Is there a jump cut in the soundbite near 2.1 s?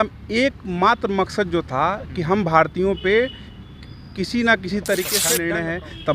no; 1 cut; at 5.3 s

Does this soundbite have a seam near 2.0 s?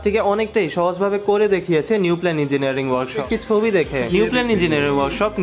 no; 1 cut; at 3.2 s

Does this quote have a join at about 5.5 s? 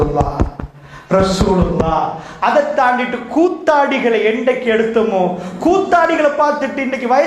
yes; 1 cut; at 5.5 s

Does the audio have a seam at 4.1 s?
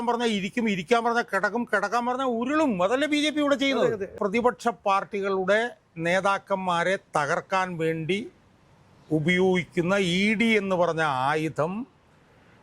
yes; 1 cut; at 4.1 s

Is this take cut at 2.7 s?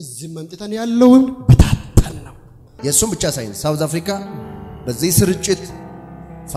yes; 1 cut; at 2.7 s

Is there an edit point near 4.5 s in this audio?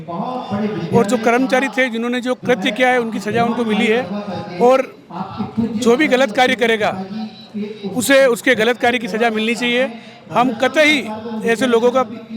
no; 0 cuts

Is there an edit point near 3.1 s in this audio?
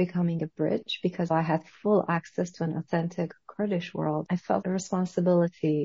no; 2 cuts; at 1.3 s, 4.6 s

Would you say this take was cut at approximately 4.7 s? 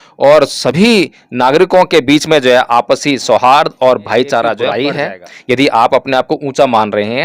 yes; 1 cut; at 4.7 s

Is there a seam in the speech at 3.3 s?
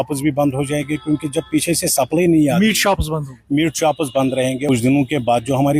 no; 1 cut; at 4.6 s

